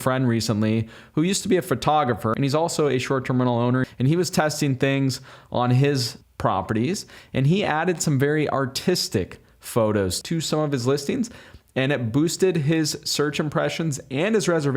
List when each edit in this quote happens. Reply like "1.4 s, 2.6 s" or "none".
2.3 s, 3.8 s, 10.2 s